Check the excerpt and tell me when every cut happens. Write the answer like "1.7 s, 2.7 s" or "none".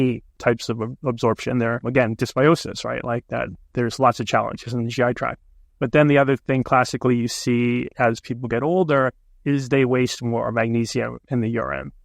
1.8 s